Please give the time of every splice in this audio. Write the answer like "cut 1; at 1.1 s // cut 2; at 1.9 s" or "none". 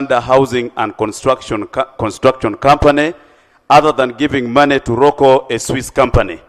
none